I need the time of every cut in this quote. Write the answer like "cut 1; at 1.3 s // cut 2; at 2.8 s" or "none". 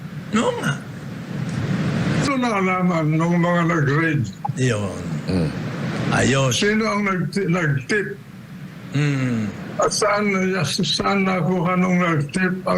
cut 1; at 2.3 s